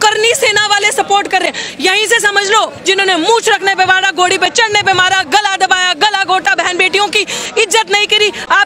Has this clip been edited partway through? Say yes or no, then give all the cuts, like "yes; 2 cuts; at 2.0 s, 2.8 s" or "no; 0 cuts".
yes; 1 cut; at 2.8 s